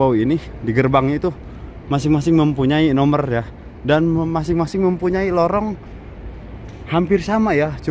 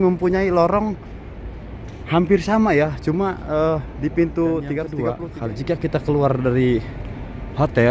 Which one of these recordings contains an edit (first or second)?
second